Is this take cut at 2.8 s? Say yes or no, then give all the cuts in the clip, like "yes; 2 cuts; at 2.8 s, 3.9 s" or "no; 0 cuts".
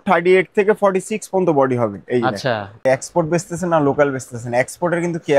yes; 1 cut; at 2.8 s